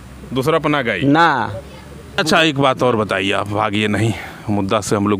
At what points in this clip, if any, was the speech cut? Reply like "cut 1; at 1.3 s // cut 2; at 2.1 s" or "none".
none